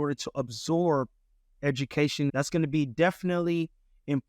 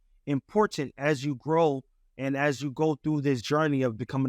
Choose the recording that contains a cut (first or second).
first